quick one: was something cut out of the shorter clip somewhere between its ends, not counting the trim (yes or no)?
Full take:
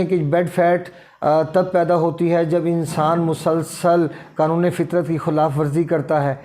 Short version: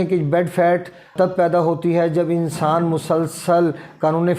yes